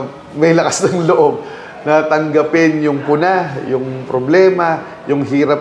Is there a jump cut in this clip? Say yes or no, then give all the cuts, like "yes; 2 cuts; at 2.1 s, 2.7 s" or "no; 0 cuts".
no; 0 cuts